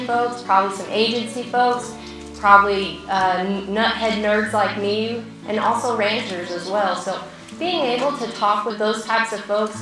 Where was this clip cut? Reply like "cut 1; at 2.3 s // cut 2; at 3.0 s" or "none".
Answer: cut 1; at 5.3 s // cut 2; at 8.8 s